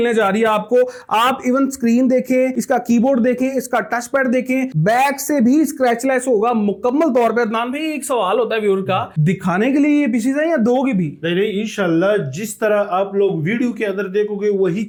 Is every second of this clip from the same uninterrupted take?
yes; 0 cuts

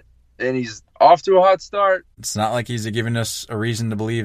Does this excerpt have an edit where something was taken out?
yes; 1 cut; at 2.2 s

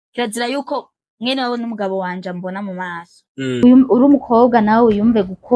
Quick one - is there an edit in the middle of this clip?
yes; 1 cut; at 3.6 s

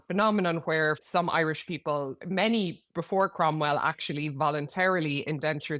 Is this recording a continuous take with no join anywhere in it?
no; 2 cuts; at 1.0 s, 2.2 s

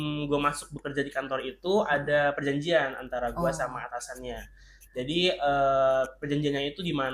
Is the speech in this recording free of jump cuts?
yes; 0 cuts

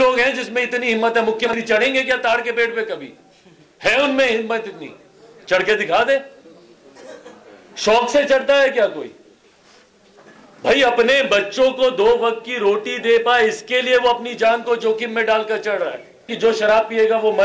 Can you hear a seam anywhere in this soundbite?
yes; 2 cuts; at 1.5 s, 16.3 s

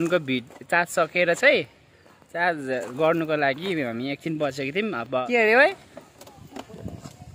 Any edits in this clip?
yes; 1 cut; at 5.3 s

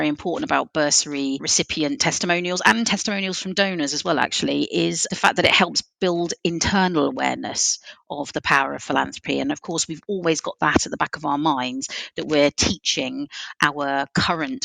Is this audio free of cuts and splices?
no; 2 cuts; at 1.5 s, 5.0 s

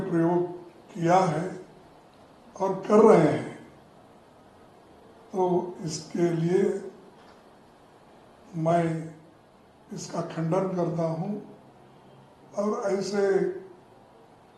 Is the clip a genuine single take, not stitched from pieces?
yes; 0 cuts

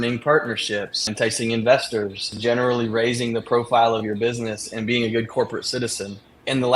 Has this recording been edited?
yes; 2 cuts; at 1.1 s, 2.3 s

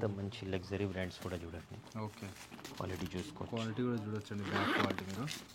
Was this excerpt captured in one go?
yes; 0 cuts

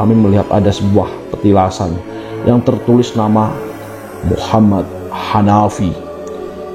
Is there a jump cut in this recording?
no; 0 cuts

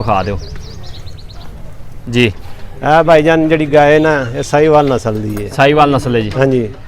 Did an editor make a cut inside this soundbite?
no; 0 cuts

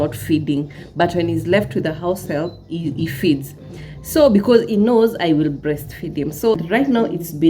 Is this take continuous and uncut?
no; 1 cut; at 6.6 s

